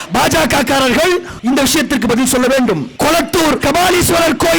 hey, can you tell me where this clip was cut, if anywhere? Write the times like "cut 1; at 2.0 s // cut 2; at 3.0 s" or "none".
cut 1; at 1.3 s // cut 2; at 3.4 s